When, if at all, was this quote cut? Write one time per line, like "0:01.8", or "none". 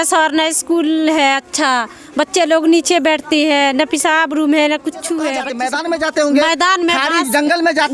0:05.5